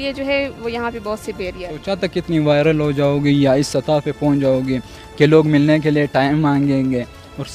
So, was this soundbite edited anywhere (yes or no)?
yes